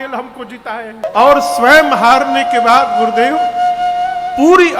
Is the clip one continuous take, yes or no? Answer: no